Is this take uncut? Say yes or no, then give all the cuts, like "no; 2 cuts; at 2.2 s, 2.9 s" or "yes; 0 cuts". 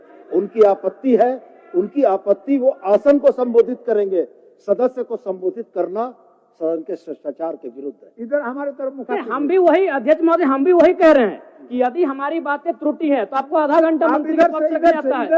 yes; 0 cuts